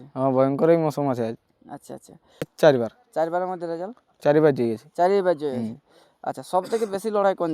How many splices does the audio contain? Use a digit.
1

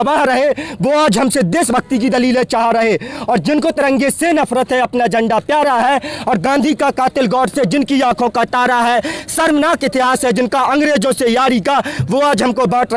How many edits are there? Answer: 0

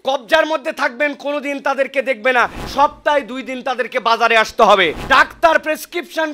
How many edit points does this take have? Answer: 2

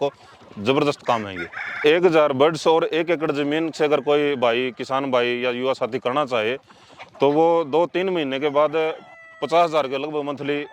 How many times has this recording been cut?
1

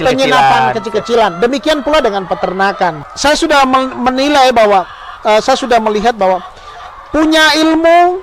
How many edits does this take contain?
1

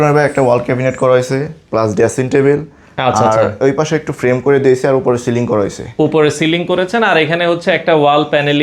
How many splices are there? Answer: 0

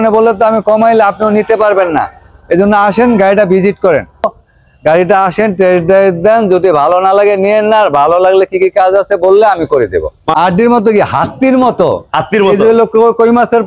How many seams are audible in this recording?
2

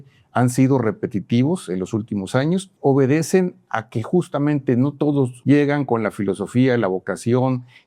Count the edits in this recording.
2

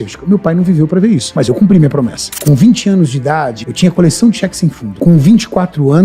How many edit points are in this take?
4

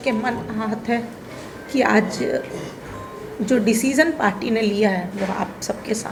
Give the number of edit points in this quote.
0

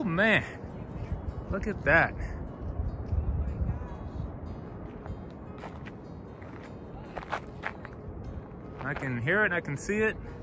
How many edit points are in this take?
0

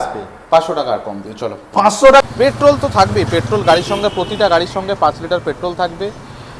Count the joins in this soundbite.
1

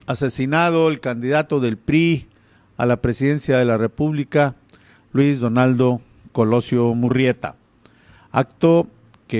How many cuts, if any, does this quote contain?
1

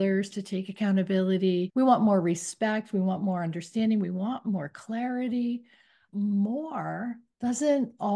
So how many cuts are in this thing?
3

